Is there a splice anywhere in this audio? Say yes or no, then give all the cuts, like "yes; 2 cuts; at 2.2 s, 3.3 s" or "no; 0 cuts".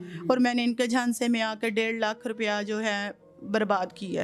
no; 0 cuts